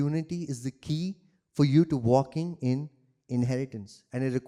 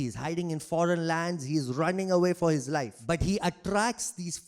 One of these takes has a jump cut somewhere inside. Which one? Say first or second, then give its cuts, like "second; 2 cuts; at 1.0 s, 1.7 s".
second; 1 cut; at 3.1 s